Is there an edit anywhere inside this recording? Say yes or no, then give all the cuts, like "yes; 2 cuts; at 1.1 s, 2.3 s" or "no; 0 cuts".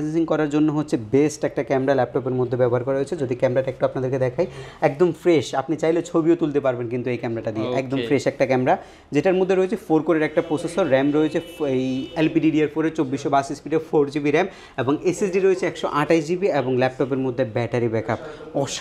no; 0 cuts